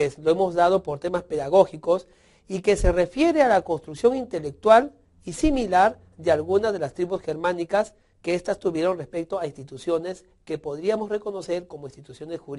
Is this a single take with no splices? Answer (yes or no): yes